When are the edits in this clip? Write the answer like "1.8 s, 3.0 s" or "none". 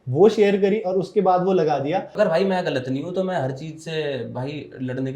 2.1 s